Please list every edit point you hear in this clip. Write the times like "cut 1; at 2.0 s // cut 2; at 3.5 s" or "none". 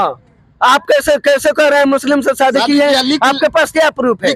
none